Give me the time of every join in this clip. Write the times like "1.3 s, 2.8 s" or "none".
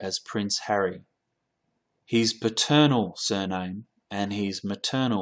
3.0 s